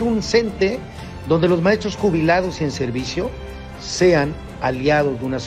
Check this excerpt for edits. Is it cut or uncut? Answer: uncut